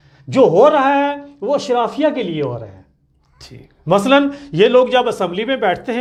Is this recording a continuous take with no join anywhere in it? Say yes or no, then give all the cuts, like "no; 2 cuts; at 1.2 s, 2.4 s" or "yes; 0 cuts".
yes; 0 cuts